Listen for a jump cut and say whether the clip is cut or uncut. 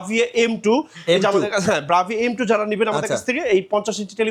uncut